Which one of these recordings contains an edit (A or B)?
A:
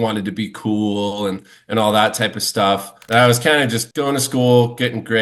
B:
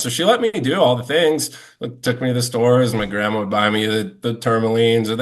A